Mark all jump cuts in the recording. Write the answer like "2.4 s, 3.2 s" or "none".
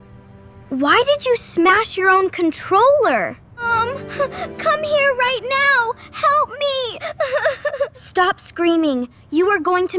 3.5 s

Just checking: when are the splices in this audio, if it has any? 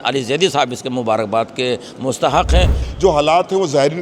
2.8 s

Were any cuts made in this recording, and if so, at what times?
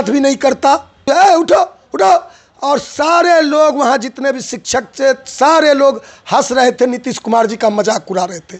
1.1 s

